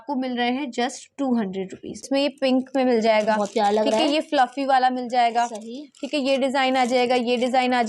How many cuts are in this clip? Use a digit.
1